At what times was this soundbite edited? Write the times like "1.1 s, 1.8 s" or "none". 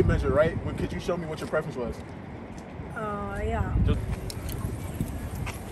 4.0 s

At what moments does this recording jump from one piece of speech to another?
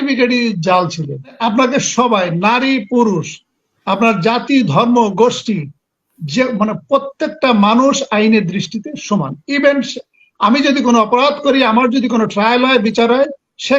1.3 s

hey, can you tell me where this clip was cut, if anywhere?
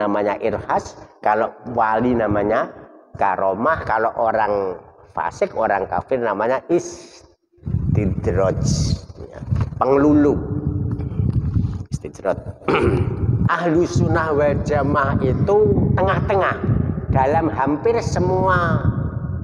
13.4 s

